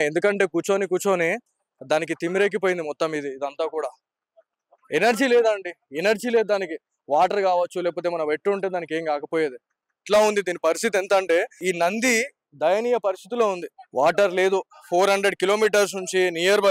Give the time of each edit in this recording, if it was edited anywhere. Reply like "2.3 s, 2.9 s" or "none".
10.0 s

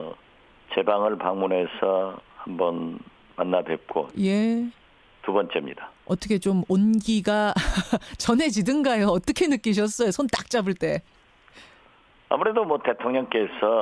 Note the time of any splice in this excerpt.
1.2 s

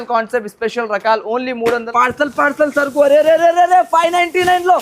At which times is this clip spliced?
1.9 s

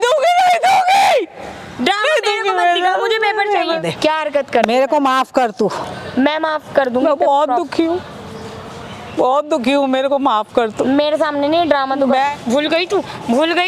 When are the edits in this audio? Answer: 3.8 s, 12.2 s

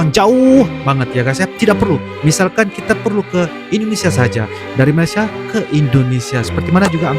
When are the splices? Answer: none

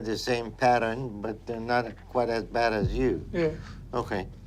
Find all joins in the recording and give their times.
none

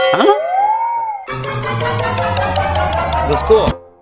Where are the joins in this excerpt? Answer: none

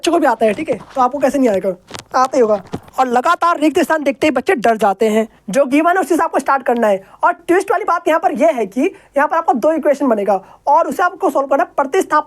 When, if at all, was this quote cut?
2.9 s, 5.3 s

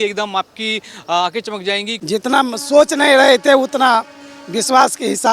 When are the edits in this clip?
1.9 s

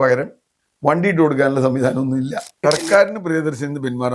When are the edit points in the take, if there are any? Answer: 2.6 s

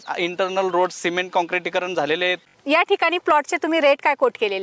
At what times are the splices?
2.5 s

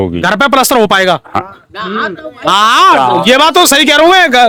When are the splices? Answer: none

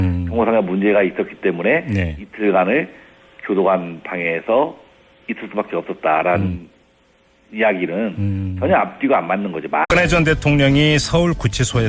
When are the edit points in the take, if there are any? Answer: none

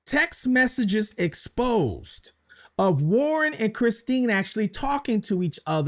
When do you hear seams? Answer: none

